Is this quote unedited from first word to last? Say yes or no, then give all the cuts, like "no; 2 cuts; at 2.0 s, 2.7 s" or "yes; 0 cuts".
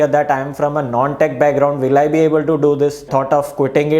no; 1 cut; at 3.1 s